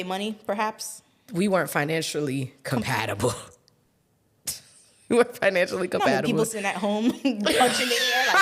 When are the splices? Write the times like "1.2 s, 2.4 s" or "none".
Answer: none